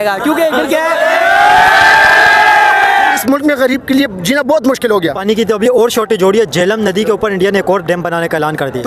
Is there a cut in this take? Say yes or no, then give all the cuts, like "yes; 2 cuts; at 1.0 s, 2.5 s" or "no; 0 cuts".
yes; 2 cuts; at 3.2 s, 5.2 s